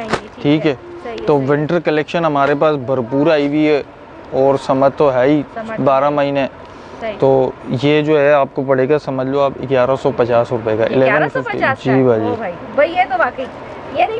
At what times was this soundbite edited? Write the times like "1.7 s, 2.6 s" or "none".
none